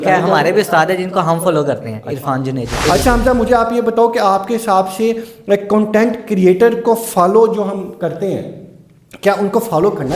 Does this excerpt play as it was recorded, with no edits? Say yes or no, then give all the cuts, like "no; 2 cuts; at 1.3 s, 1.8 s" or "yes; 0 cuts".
no; 1 cut; at 2.8 s